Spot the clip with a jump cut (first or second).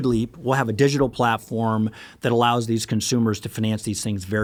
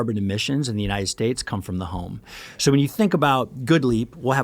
second